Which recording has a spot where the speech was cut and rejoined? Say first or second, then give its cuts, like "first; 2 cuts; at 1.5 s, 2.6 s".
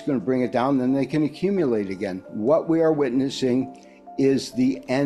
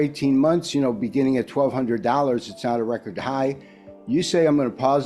first; 1 cut; at 2.3 s